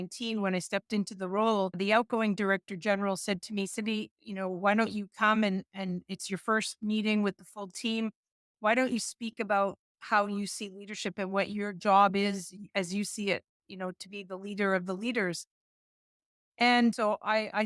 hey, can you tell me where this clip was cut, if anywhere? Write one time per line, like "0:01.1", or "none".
0:01.7
0:16.9